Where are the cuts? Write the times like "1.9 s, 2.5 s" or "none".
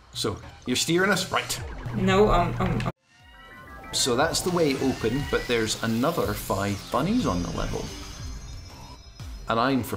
none